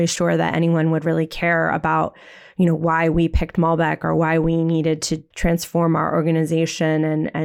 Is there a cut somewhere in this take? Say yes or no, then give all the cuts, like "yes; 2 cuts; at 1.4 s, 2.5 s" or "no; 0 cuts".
no; 0 cuts